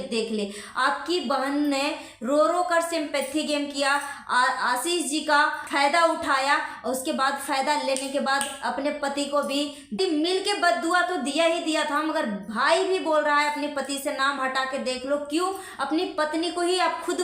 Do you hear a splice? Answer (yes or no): yes